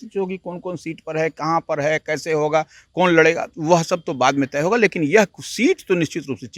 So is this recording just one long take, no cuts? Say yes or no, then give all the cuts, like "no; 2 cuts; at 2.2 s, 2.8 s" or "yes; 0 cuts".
yes; 0 cuts